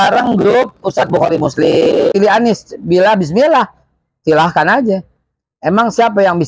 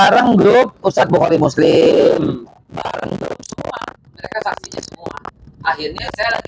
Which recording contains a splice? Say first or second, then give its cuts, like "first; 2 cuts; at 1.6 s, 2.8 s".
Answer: first; 1 cut; at 2.1 s